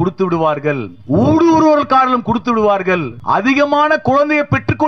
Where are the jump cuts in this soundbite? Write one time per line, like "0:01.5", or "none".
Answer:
0:00.9
0:03.1